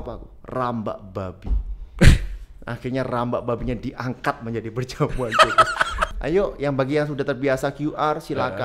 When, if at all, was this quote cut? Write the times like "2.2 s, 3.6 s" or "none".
6.1 s